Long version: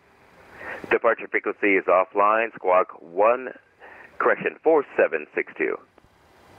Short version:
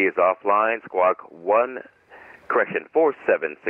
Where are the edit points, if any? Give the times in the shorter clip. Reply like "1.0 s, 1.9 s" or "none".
none